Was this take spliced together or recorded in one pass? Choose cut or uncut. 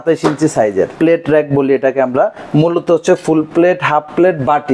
cut